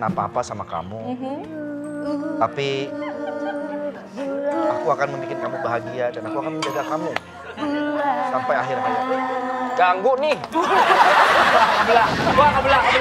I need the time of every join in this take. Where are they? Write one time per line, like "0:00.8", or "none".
none